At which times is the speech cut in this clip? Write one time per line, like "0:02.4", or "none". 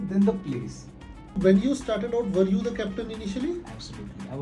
0:01.3